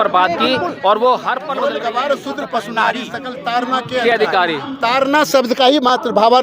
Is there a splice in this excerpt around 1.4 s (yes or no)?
yes